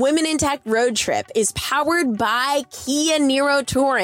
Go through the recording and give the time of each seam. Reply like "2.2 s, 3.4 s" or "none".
none